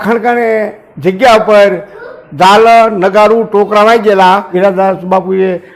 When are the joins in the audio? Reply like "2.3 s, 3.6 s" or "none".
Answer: 4.5 s

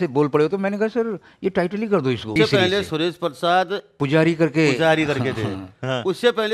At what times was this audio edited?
2.3 s, 3.9 s

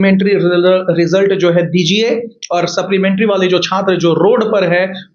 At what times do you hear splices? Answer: none

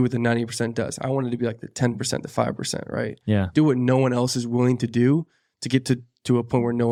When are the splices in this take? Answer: none

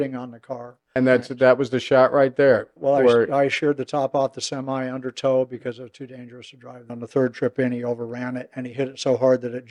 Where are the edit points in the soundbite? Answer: 0.8 s, 6.9 s

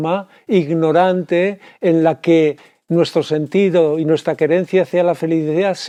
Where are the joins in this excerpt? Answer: none

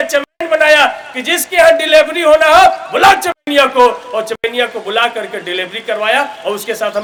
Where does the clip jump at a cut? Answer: none

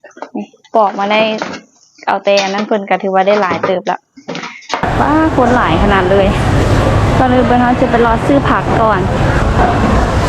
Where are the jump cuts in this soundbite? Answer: 4.8 s

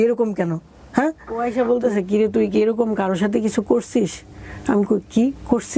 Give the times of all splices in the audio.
1.4 s

